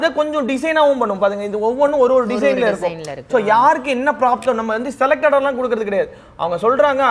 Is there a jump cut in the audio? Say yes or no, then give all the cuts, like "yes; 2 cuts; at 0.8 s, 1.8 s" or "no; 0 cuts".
no; 0 cuts